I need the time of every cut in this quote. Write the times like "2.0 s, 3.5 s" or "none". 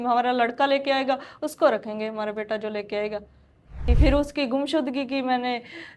3.8 s